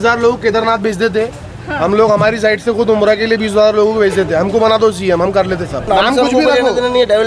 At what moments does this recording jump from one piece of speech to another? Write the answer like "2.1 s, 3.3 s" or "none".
5.9 s